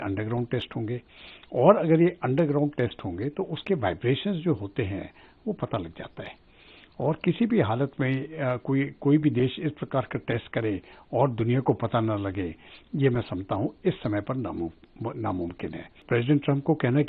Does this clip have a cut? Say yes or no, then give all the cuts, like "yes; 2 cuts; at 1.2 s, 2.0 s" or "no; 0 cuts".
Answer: yes; 1 cut; at 16.0 s